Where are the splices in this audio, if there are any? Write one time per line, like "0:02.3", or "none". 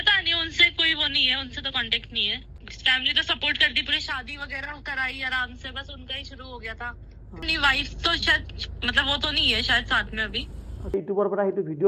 0:02.4
0:07.4
0:10.9